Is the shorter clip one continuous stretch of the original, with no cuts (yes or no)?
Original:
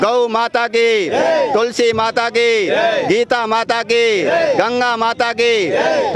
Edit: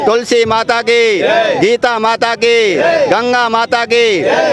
yes